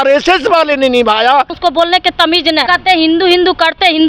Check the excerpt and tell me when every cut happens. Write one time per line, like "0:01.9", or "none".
0:01.5
0:02.6

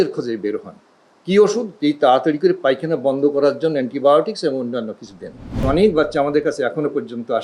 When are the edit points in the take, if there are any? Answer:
0:05.6

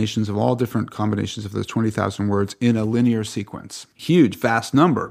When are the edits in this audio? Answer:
0:04.0

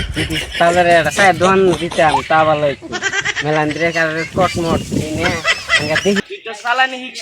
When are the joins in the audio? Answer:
0:06.2

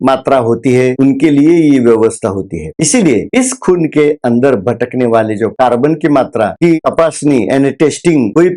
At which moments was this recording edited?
0:06.8

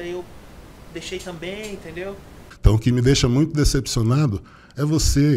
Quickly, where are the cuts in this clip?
0:02.1

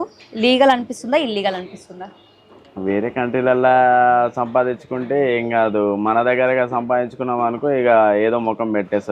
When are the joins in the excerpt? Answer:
none

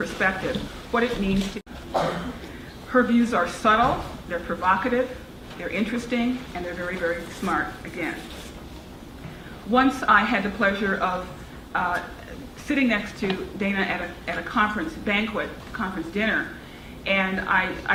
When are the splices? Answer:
none

